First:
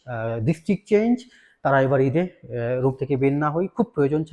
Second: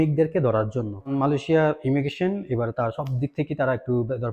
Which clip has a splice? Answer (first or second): second